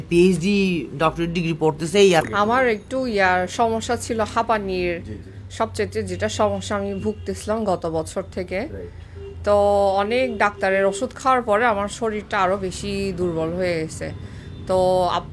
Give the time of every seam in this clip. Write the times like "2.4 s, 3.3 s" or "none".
2.3 s